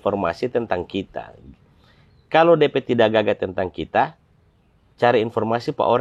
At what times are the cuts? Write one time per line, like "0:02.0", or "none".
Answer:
none

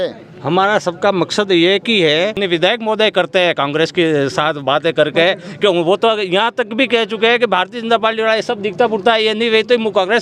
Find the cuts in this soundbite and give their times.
0:02.4

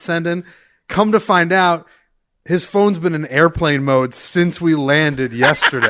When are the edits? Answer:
none

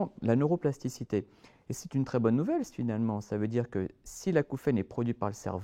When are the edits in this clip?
none

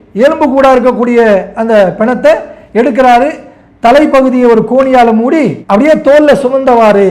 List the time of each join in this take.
none

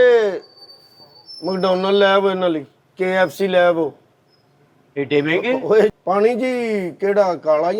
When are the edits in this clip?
0:06.0

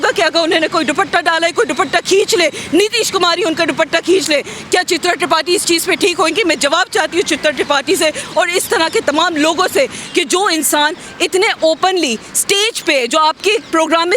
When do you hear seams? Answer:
0:10.0

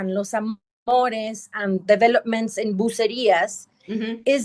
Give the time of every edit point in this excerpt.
none

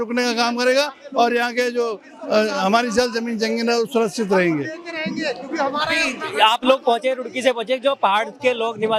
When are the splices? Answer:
none

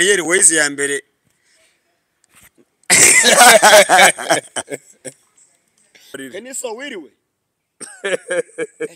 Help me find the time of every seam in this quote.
0:06.2

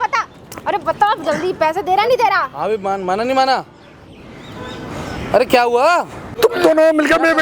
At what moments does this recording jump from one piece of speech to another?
none

